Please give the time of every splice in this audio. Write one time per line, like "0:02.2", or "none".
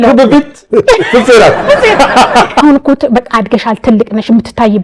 0:02.5